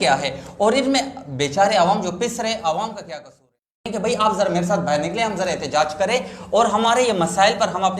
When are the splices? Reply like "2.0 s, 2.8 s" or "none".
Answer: 3.7 s